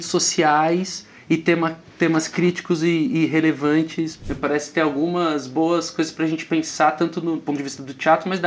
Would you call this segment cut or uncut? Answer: cut